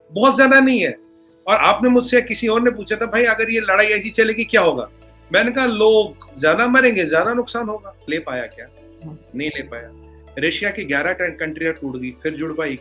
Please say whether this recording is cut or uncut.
cut